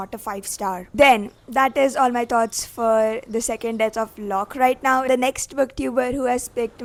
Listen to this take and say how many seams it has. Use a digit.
0